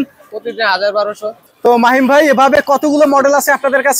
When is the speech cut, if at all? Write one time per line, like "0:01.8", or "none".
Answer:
0:01.5